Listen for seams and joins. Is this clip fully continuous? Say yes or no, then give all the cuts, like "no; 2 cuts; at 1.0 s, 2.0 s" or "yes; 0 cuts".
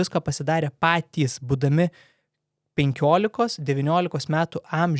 yes; 0 cuts